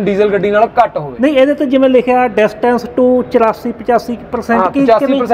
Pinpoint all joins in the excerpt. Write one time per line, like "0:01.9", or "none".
none